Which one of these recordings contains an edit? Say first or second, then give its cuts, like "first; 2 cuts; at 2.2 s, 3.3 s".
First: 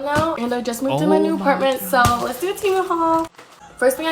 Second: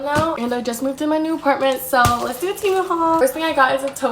second; 1 cut; at 3.2 s